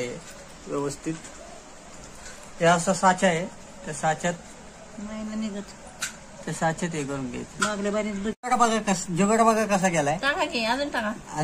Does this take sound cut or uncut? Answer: uncut